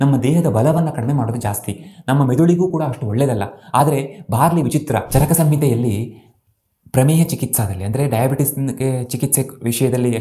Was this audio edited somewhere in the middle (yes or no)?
yes